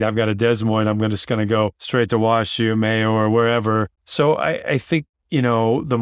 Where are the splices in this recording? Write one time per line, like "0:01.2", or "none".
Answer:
0:01.8
0:04.0